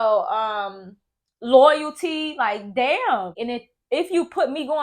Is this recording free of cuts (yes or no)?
no